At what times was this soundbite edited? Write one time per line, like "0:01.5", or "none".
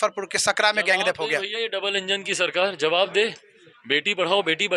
none